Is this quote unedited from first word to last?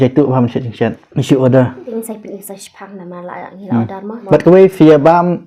no; 3 cuts; at 1.1 s, 1.8 s, 4.2 s

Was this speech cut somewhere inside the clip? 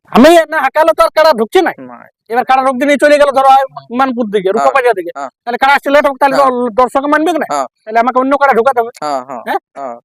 no; 0 cuts

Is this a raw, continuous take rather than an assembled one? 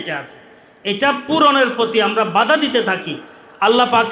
yes; 0 cuts

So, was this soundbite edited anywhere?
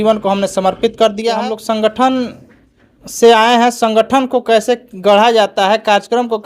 yes; 1 cut; at 1.4 s

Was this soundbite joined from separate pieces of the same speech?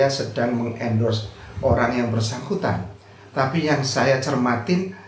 no; 0 cuts

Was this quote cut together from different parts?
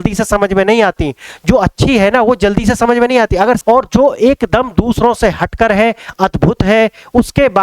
yes; 1 cut; at 3.6 s

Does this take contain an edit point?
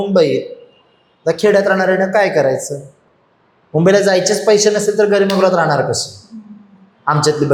no; 0 cuts

